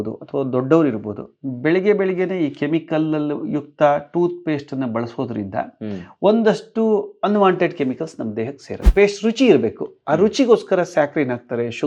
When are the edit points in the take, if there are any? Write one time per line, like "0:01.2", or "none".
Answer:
0:08.8